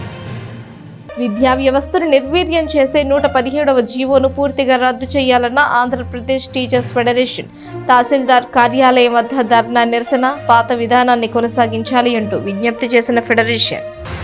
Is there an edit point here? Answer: no; 0 cuts

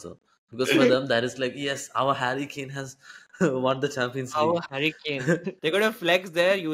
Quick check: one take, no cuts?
no; 1 cut; at 5.5 s

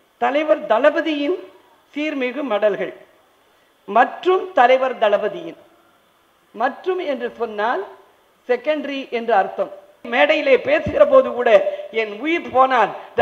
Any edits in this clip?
yes; 1 cut; at 10.0 s

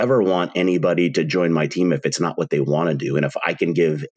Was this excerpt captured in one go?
yes; 0 cuts

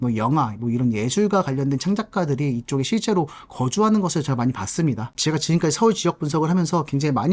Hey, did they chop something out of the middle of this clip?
yes; 1 cut; at 5.2 s

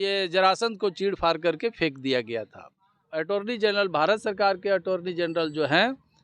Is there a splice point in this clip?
yes; 1 cut; at 3.0 s

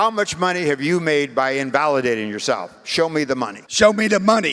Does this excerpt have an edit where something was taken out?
yes; 1 cut; at 3.6 s

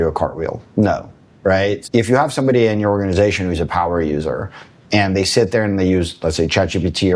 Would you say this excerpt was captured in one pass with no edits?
no; 1 cut; at 1.8 s

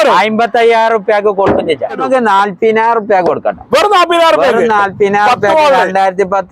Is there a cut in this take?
yes; 1 cut; at 2.0 s

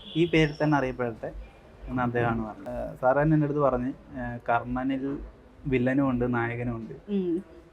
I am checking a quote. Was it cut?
yes; 1 cut; at 2.7 s

